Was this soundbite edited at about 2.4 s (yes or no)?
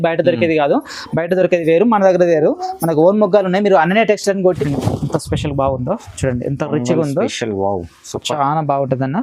no